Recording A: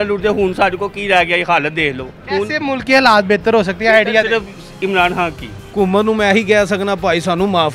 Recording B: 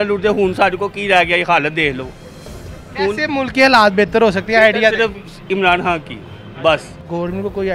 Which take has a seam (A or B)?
A